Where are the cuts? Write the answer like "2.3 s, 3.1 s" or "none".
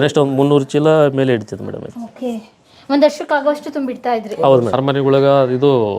4.7 s